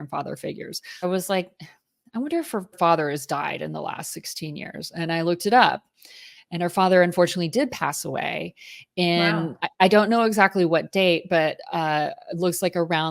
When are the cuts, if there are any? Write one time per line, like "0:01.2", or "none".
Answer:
0:01.0
0:02.8